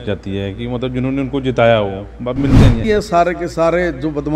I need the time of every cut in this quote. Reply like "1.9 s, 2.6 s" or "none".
2.8 s